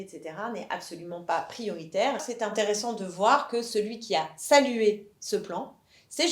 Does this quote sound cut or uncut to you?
cut